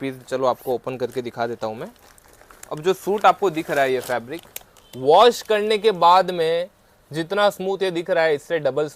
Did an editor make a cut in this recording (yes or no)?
no